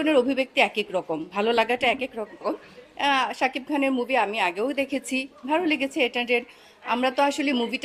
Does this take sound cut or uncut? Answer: uncut